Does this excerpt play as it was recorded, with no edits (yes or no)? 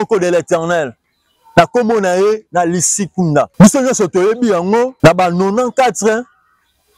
no